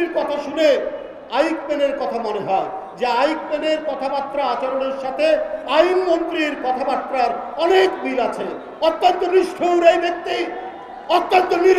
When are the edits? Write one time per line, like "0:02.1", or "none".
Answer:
none